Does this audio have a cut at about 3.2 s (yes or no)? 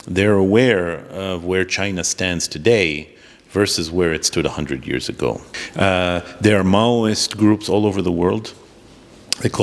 no